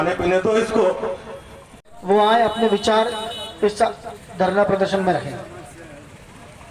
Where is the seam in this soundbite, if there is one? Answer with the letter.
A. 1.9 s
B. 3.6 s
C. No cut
A